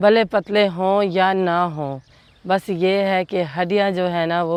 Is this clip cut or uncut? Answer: uncut